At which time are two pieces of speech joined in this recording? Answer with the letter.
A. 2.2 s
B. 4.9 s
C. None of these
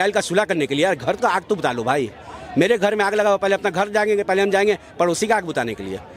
C